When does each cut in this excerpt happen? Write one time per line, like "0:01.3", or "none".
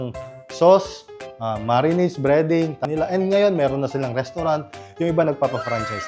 0:02.8

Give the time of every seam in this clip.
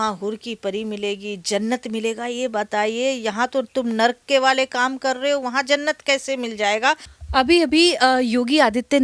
none

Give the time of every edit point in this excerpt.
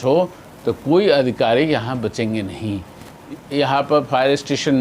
0:03.3

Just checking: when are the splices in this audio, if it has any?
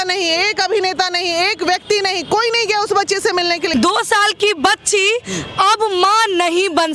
0:03.7

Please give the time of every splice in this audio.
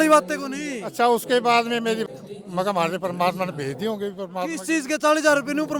0:02.0

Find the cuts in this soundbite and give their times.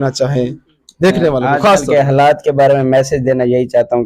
none

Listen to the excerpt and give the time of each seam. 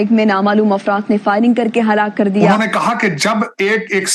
0:02.5

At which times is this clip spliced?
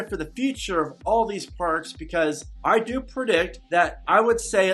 0:02.5
0:03.6

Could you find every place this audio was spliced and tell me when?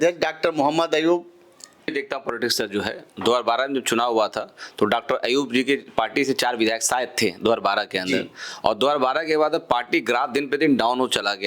0:01.9

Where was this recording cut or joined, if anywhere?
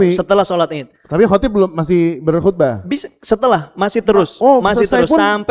none

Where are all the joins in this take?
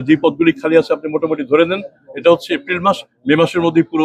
none

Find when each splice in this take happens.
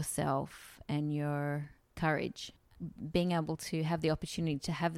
0:01.8
0:02.7

